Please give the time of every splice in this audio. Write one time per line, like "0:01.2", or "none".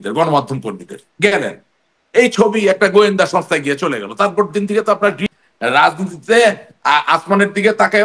0:05.2